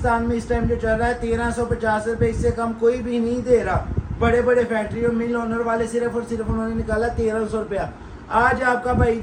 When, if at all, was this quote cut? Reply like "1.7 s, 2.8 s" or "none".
none